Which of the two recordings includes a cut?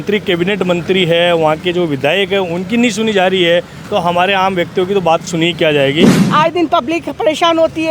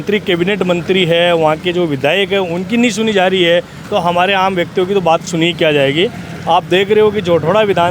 first; 1 cut; at 6.2 s

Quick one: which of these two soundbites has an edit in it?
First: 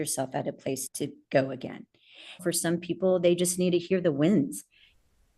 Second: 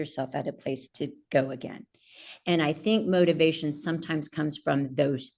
first; 1 cut; at 2.4 s

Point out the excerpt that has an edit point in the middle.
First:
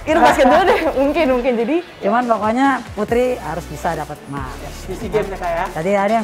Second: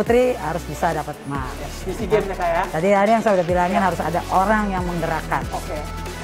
first; 1 cut; at 1.9 s

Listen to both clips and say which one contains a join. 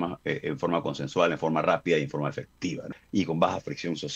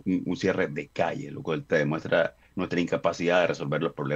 first; 1 cut; at 2.9 s

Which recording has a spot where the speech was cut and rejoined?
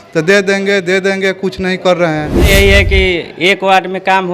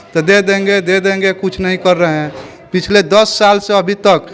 first; 1 cut; at 2.5 s

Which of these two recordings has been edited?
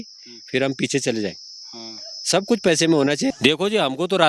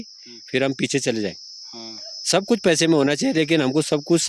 first; 1 cut; at 3.3 s

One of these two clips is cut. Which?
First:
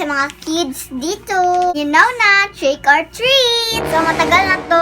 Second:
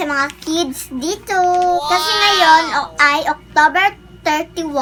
first; 1 cut; at 1.7 s

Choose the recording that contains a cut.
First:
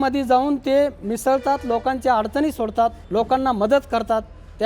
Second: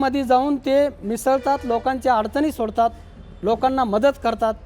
first; 1 cut; at 3.0 s

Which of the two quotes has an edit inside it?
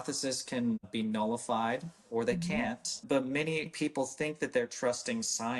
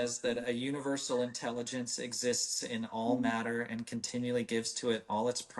first; 3 cuts; at 0.9 s, 2.9 s, 3.7 s

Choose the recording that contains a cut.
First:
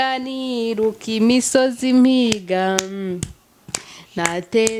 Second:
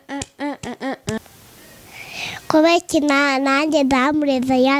second; 1 cut; at 1.2 s

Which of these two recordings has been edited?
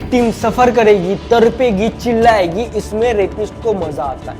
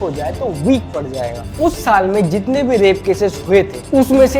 second; 1 cut; at 1.4 s

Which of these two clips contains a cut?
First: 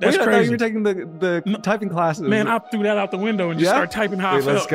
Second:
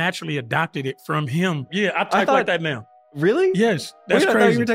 second; 1 cut; at 1.7 s

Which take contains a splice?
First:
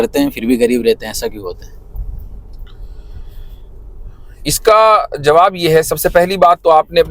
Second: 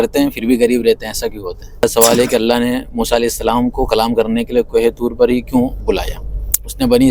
second; 1 cut; at 1.8 s

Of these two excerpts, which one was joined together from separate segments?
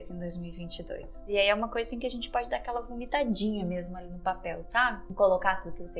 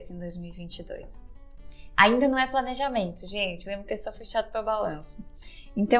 first; 2 cuts; at 1.3 s, 5.0 s

